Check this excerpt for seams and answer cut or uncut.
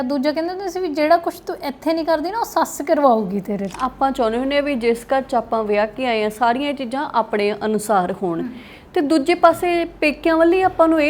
cut